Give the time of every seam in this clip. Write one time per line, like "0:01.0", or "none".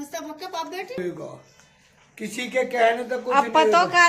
0:01.0